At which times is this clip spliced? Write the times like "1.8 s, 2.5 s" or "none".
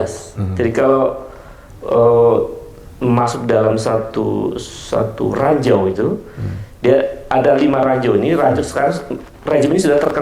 none